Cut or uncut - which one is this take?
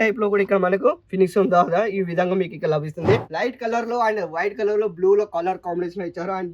cut